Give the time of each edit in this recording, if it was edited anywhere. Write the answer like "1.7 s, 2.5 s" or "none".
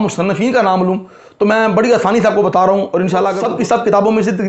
3.4 s